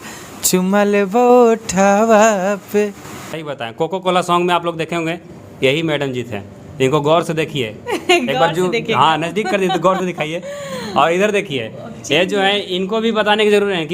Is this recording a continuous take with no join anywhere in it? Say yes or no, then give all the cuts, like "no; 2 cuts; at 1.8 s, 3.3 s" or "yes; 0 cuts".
no; 1 cut; at 3.4 s